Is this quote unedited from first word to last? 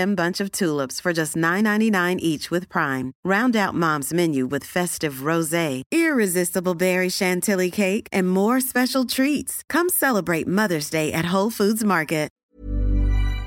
no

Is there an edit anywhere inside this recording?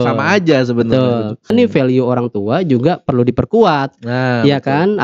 yes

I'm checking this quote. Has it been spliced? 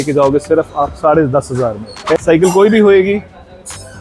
yes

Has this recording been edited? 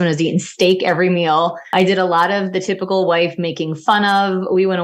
yes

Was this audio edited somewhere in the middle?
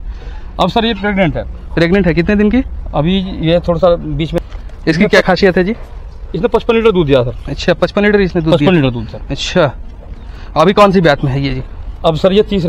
yes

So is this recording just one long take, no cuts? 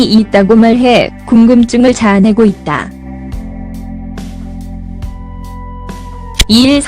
no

